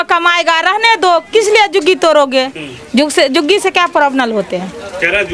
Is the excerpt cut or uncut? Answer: uncut